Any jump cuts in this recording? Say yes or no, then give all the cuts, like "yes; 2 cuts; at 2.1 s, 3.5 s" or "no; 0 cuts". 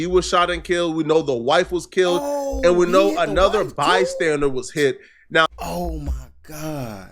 yes; 1 cut; at 5.5 s